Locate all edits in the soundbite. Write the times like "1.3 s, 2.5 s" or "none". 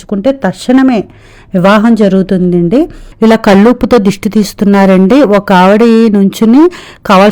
3.0 s